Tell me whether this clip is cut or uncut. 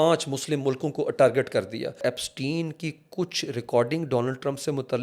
cut